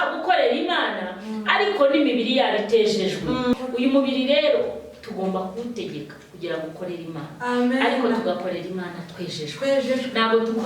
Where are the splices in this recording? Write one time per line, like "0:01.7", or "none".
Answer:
0:03.5